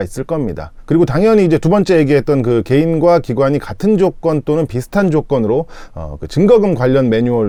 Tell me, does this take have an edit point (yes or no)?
no